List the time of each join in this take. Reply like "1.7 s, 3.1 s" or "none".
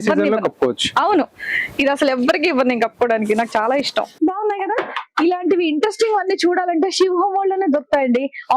4.1 s